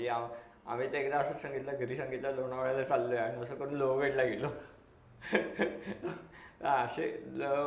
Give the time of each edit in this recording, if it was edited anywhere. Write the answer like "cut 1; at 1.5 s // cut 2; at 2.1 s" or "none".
none